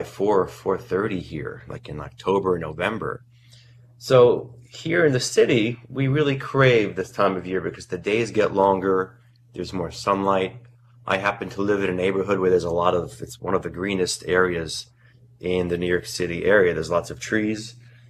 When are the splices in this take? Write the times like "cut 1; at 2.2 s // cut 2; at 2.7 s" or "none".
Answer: cut 1; at 10.0 s